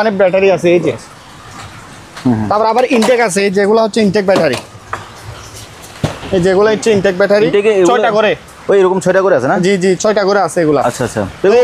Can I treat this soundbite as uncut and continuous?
yes; 0 cuts

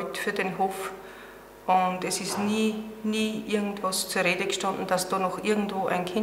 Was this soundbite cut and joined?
no; 0 cuts

